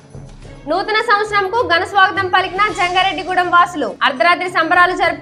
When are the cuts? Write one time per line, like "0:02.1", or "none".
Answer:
none